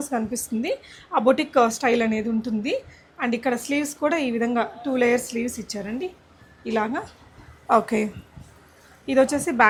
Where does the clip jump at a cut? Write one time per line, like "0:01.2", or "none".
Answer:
none